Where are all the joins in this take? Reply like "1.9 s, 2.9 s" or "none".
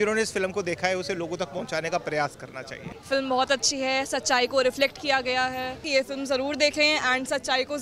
2.9 s, 5.8 s